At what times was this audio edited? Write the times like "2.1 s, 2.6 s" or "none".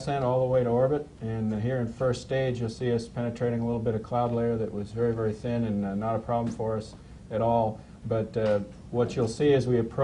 8.4 s